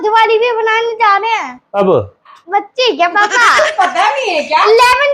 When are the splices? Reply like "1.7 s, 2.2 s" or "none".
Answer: 1.6 s, 2.4 s